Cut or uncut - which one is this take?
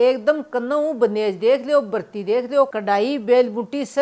uncut